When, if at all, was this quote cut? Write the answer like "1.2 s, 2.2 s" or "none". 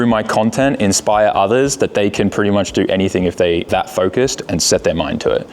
3.7 s